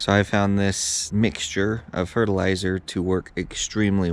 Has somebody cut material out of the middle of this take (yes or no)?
yes